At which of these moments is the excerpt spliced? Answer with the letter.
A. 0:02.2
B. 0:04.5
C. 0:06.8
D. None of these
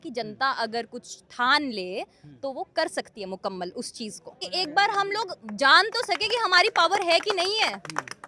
B